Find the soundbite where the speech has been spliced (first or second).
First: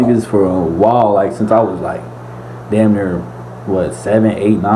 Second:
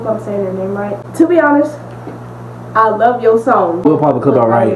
second